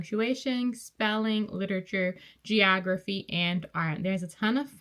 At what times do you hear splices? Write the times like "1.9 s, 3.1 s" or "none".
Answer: none